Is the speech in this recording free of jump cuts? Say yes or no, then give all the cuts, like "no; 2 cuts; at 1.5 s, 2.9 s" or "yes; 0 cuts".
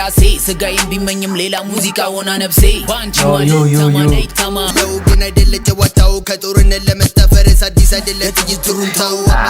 no; 1 cut; at 4.7 s